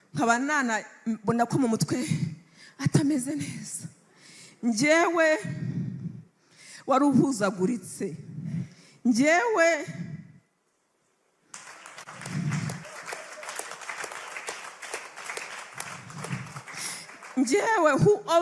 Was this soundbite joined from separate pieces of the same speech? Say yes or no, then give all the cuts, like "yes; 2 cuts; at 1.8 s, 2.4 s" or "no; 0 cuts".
yes; 1 cut; at 11.5 s